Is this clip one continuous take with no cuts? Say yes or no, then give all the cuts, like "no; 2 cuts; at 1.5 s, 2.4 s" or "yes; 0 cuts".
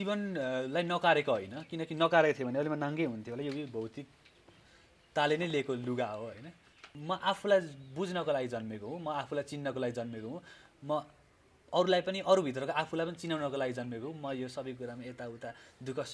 no; 1 cut; at 6.9 s